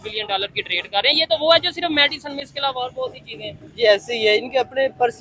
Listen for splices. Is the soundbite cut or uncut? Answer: uncut